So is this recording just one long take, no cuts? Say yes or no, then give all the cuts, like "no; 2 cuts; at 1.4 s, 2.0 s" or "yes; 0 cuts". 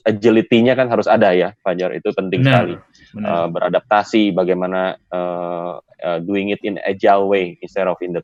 yes; 0 cuts